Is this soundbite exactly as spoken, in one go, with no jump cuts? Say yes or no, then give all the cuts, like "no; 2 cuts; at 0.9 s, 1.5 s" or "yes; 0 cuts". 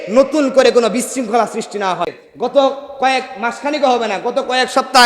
no; 1 cut; at 2.2 s